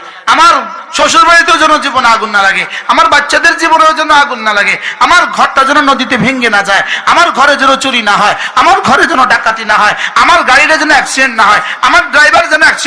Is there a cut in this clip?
no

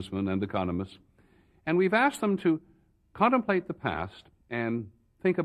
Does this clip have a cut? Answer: no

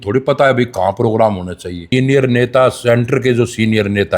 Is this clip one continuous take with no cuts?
no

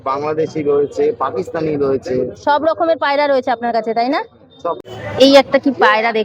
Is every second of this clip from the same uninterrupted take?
no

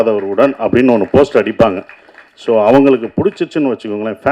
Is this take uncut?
yes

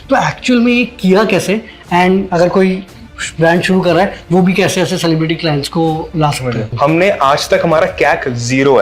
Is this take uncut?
no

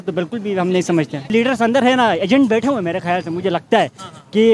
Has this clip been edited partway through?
yes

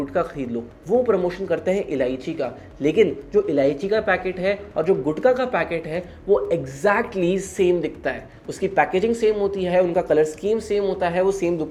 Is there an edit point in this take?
no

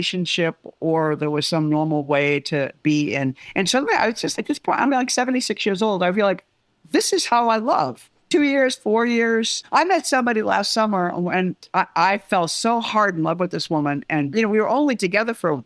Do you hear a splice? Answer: yes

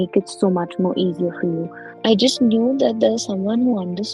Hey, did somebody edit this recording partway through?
yes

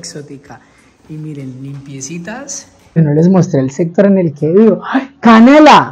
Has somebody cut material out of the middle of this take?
yes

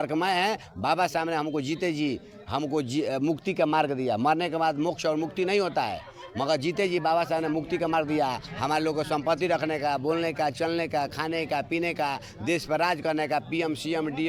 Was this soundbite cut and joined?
no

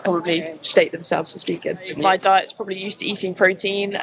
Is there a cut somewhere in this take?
yes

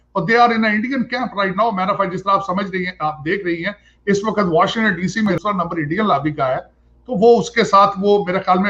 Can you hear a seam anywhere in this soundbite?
yes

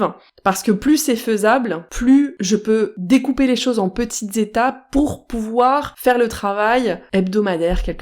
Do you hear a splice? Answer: yes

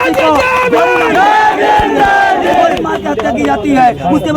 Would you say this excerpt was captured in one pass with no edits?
yes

